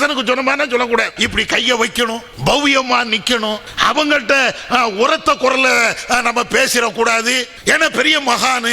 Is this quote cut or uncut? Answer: cut